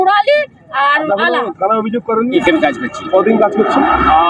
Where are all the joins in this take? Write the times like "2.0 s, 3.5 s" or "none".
none

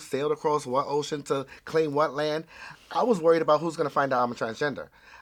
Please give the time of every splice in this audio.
none

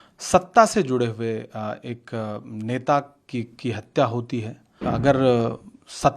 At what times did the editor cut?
4.9 s

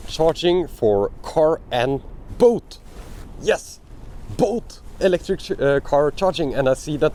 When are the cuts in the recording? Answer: none

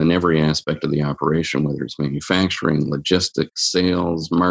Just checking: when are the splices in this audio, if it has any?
none

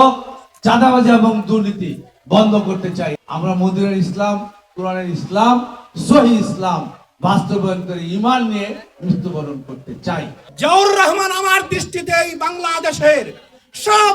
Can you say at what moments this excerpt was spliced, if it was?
3.2 s, 10.4 s

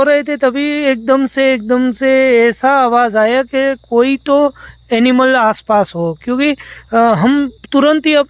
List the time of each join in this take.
none

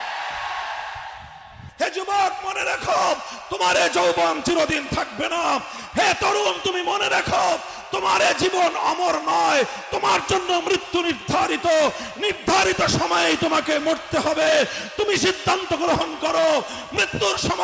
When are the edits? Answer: 1.6 s

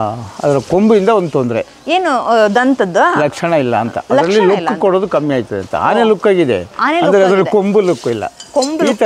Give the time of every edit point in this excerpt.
none

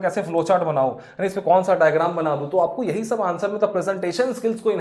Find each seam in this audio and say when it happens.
none

